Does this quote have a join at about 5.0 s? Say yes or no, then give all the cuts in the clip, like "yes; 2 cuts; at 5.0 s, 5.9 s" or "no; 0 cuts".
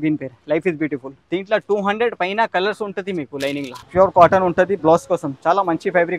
no; 2 cuts; at 1.1 s, 3.8 s